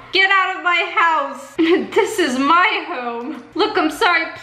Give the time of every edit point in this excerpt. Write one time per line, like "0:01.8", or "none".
0:01.4
0:03.4